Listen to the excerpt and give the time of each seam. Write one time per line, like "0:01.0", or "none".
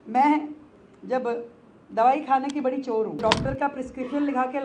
0:03.2